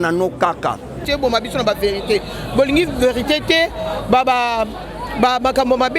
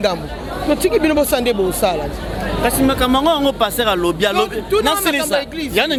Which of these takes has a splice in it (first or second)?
first